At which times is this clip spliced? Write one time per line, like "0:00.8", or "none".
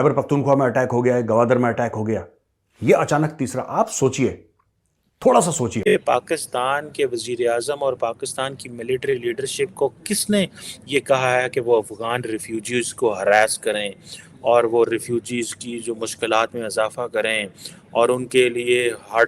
0:05.8